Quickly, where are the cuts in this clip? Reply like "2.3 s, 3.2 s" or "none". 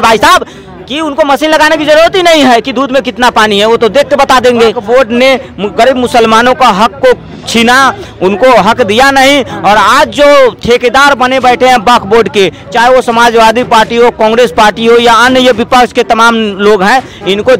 4.8 s